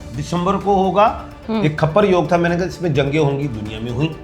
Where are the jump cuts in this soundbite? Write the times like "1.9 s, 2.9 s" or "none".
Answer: 1.4 s